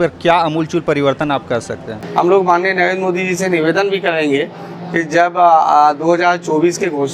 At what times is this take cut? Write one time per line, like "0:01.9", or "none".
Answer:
0:01.9